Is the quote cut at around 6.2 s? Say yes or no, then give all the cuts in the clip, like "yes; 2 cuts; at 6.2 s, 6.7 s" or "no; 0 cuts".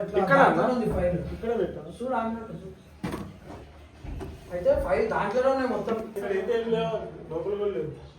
yes; 1 cut; at 6.2 s